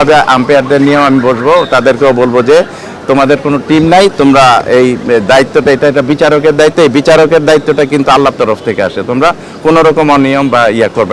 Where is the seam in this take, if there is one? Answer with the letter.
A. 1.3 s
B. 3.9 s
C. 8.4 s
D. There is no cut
D